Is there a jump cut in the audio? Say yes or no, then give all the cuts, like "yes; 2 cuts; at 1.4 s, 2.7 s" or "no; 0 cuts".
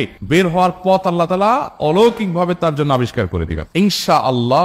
yes; 1 cut; at 3.6 s